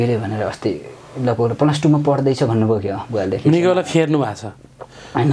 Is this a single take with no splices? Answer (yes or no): yes